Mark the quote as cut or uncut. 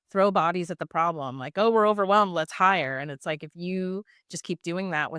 uncut